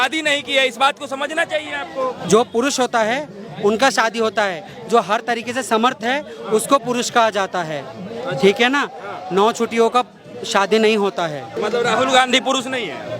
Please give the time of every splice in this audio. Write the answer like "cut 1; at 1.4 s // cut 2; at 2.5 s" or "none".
cut 1; at 2.2 s // cut 2; at 11.5 s